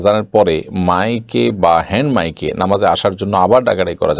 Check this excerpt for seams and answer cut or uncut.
uncut